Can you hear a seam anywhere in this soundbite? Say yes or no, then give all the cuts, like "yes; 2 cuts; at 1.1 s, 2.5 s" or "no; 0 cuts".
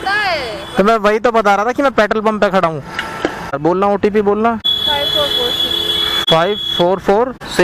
no; 0 cuts